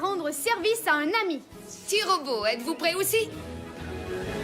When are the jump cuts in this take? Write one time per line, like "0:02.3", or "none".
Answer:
0:03.4